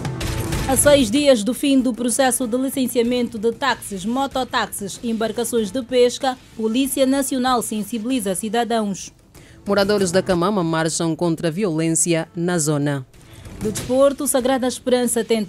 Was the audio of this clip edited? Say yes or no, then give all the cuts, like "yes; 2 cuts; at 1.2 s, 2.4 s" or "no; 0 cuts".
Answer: no; 0 cuts